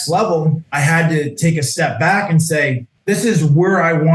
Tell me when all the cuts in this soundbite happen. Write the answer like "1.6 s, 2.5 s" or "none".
2.9 s